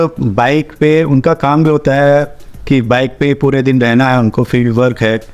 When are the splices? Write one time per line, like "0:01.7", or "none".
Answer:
none